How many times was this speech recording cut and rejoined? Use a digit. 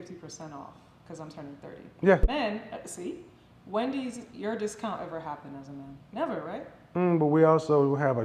1